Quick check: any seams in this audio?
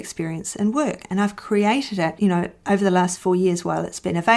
no; 0 cuts

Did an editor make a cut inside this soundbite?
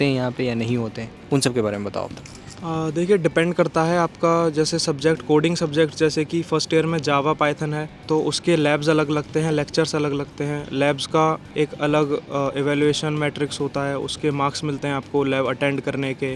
no; 0 cuts

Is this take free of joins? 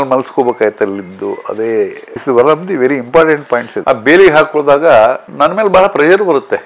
no; 1 cut; at 3.8 s

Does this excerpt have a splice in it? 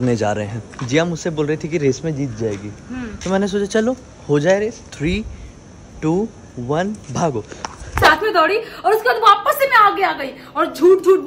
yes; 2 cuts; at 4.9 s, 8.0 s

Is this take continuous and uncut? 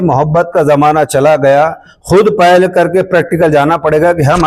yes; 0 cuts

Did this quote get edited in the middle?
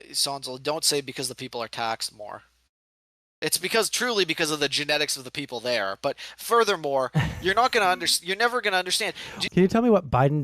yes; 1 cut; at 9.4 s

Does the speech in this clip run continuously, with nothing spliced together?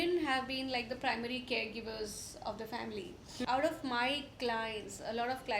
no; 1 cut; at 3.2 s

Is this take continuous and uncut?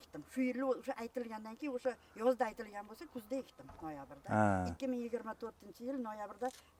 yes; 0 cuts

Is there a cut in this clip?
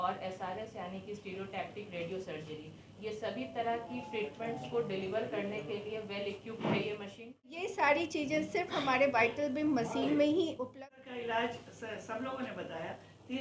yes; 2 cuts; at 7.6 s, 10.7 s

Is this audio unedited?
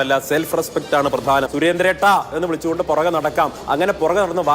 no; 1 cut; at 1.5 s

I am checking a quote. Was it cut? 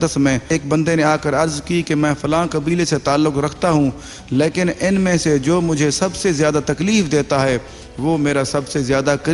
no; 0 cuts

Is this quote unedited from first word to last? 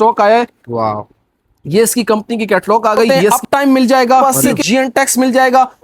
no; 2 cuts; at 3.2 s, 4.4 s

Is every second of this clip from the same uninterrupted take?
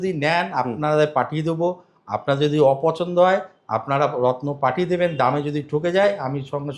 yes; 0 cuts

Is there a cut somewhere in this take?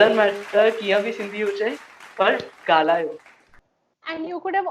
yes; 1 cut; at 3.6 s

